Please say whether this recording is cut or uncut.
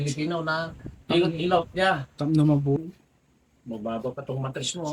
cut